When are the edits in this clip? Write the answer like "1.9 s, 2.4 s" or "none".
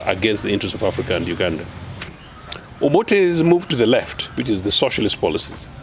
2.2 s